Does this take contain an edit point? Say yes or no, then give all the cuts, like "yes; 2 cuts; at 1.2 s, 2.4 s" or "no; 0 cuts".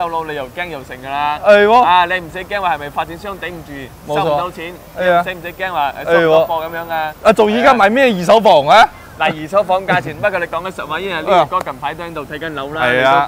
no; 0 cuts